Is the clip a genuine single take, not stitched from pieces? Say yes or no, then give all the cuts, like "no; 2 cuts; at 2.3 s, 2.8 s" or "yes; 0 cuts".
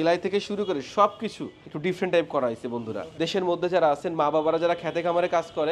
no; 1 cut; at 3.1 s